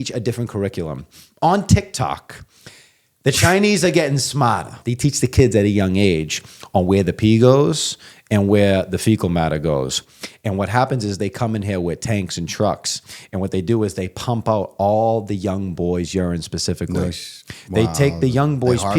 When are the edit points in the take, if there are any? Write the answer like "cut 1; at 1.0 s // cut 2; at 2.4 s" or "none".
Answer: cut 1; at 4.7 s